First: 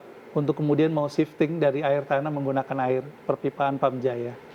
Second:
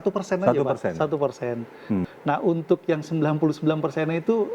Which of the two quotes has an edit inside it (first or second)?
second